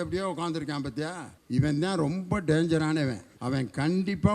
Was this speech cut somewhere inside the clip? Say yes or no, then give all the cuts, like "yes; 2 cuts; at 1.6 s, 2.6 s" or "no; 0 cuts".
yes; 2 cuts; at 1.3 s, 3.3 s